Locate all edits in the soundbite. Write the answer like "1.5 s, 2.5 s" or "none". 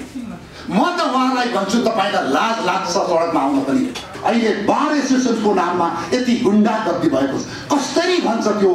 4.1 s